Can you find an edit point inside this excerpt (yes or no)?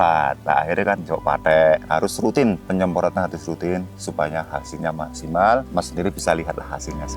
yes